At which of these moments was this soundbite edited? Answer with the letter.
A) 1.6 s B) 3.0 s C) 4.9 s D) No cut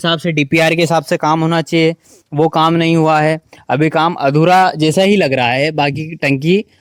D